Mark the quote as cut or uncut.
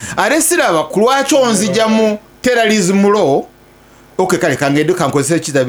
uncut